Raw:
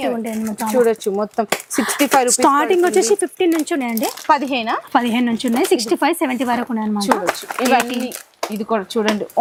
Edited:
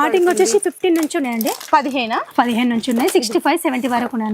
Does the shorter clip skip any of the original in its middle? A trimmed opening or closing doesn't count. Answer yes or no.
no